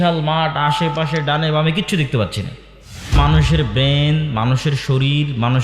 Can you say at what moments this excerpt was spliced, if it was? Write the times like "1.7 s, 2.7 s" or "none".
3.2 s